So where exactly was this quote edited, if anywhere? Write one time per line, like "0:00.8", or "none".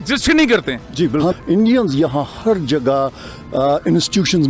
0:01.4